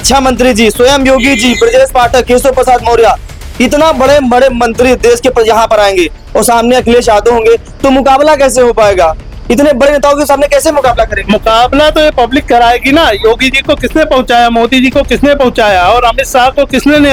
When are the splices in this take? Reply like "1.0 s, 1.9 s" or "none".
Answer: none